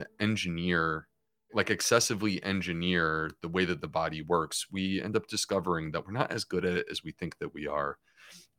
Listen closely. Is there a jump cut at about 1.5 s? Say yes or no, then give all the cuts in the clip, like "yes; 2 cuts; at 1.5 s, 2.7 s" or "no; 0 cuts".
yes; 1 cut; at 1.5 s